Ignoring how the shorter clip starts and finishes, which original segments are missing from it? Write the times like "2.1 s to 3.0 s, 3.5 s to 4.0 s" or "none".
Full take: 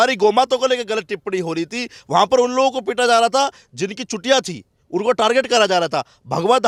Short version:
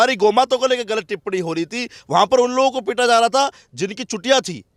none